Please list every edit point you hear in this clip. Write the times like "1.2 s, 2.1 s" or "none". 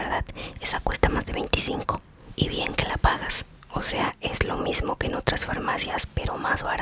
3.5 s